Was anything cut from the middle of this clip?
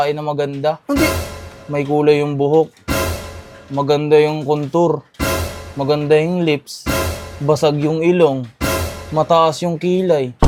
no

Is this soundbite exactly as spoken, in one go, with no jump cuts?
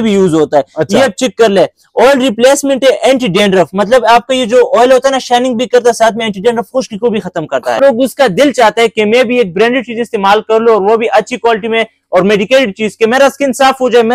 no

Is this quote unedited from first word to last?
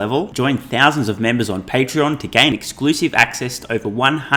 yes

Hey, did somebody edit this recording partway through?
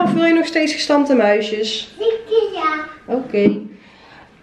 no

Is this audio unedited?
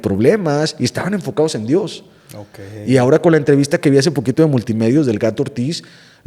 yes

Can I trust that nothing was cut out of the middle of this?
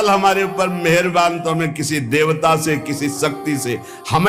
yes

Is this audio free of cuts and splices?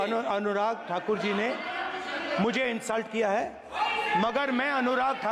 yes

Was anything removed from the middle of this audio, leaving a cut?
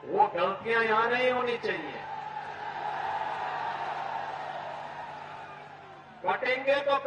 no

